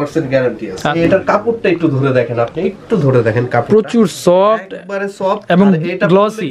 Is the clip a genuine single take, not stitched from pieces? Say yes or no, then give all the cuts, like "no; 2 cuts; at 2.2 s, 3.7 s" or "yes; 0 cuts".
no; 1 cut; at 0.9 s